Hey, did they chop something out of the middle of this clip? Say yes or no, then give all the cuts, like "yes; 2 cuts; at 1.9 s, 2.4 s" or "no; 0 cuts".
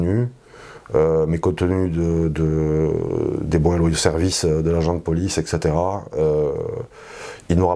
no; 0 cuts